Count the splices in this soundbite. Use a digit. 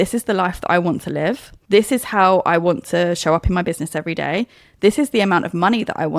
1